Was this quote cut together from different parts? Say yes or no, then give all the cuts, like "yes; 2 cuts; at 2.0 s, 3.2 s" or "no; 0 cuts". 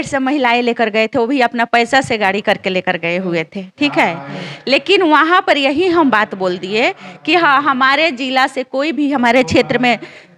no; 0 cuts